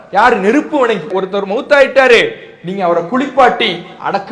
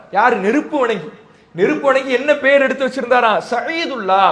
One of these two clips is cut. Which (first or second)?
first